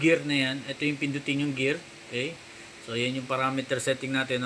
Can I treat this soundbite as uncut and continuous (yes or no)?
yes